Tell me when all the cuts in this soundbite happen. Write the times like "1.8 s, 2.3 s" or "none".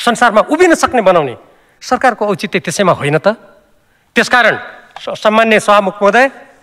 none

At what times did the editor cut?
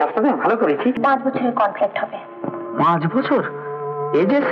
1.0 s

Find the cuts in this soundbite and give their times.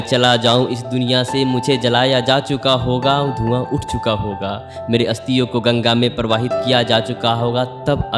none

